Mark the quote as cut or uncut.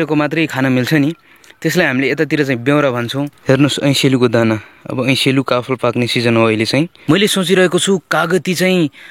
cut